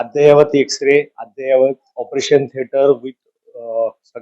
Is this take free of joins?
yes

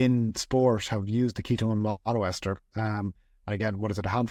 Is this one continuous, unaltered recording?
yes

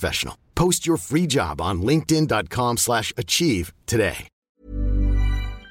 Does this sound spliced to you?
yes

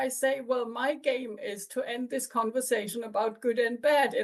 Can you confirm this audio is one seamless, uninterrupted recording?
yes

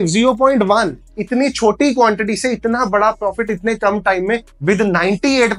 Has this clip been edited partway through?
no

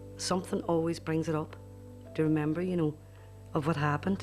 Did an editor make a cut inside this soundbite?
no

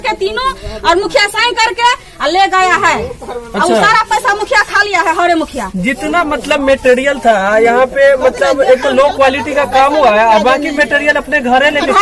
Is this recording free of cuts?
yes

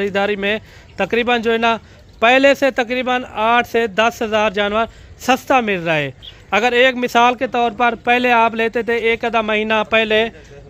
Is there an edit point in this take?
no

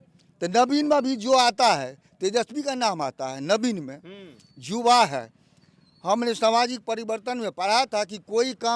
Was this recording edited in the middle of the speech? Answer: no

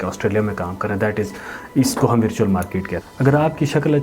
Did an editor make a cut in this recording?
yes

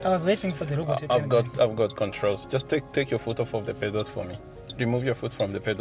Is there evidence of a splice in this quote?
yes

